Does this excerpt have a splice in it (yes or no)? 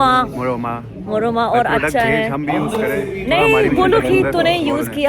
no